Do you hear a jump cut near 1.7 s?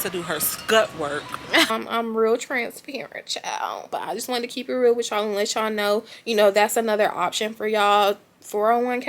yes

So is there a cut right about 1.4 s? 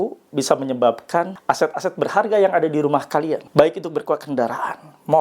yes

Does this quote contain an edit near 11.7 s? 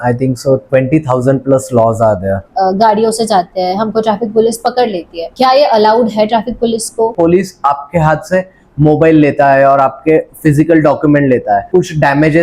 yes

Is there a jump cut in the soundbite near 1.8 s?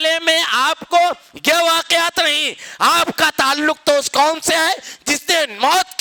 no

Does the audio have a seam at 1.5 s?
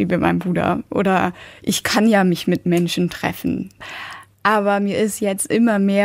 yes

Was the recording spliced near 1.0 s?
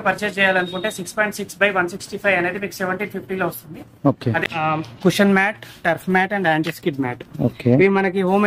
no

